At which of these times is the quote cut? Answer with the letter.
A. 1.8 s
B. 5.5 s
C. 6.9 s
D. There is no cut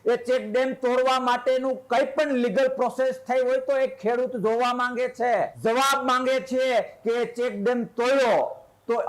B